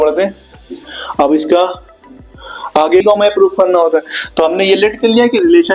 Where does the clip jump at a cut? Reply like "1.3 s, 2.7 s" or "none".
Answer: 3.0 s